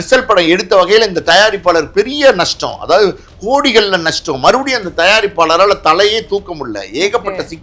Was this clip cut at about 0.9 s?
no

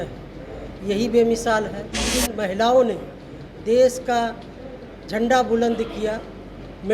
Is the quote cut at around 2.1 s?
yes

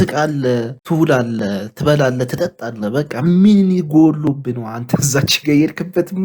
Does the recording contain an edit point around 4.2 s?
no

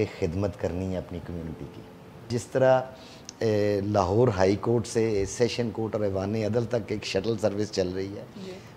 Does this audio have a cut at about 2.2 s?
yes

